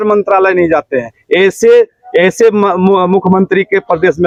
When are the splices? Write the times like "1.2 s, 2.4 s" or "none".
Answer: none